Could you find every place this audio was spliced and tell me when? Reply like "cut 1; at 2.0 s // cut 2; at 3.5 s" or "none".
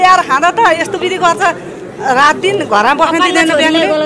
none